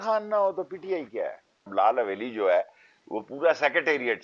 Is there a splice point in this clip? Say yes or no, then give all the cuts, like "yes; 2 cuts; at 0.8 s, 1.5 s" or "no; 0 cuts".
yes; 1 cut; at 1.7 s